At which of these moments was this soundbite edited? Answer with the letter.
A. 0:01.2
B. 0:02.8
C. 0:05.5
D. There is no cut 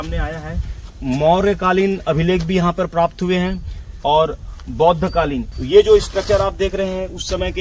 C